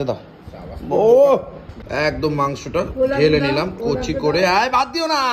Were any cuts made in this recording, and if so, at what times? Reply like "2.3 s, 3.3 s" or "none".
1.7 s